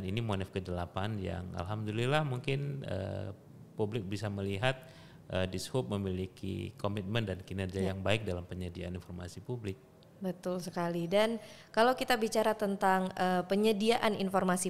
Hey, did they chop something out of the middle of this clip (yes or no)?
no